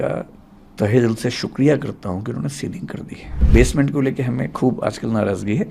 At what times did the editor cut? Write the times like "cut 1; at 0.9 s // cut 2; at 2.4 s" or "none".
cut 1; at 3.5 s